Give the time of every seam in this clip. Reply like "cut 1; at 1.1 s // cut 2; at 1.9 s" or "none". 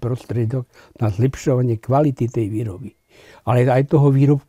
none

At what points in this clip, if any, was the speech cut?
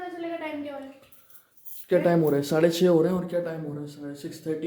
none

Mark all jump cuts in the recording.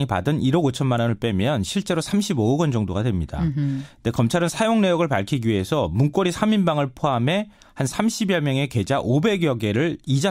cut 1; at 3.9 s

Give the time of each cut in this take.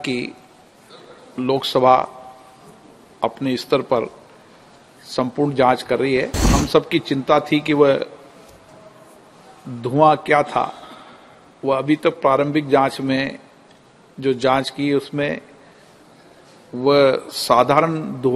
cut 1; at 6.4 s

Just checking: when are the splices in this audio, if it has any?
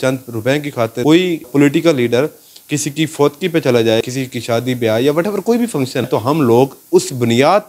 cut 1; at 4.1 s // cut 2; at 6.1 s

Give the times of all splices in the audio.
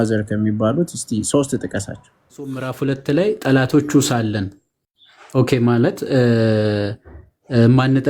cut 1; at 2.7 s

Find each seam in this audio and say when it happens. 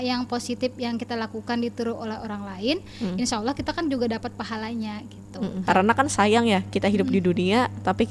cut 1; at 5.6 s

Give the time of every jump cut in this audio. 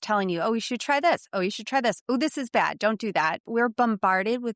cut 1; at 3.5 s

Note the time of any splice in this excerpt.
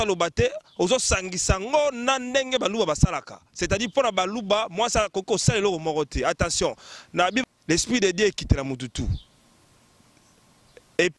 cut 1; at 7.4 s

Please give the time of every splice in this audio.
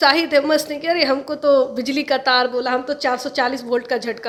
none

